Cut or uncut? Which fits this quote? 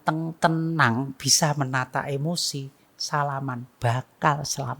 uncut